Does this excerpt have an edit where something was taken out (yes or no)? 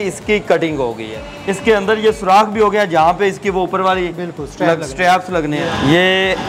yes